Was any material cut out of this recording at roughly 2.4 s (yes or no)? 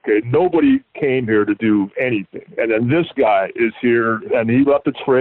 yes